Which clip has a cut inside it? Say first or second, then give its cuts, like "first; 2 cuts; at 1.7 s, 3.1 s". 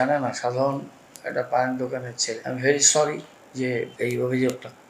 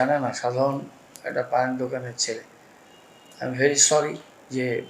first; 2 cuts; at 2.4 s, 3.9 s